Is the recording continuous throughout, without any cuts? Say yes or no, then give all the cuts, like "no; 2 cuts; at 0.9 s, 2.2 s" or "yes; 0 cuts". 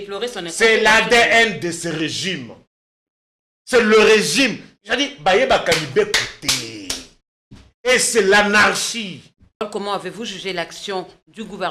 no; 1 cut; at 9.6 s